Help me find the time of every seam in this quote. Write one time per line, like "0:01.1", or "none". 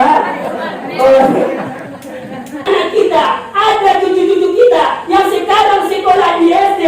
0:02.7